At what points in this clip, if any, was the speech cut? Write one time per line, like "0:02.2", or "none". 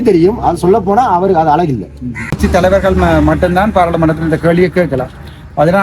0:02.4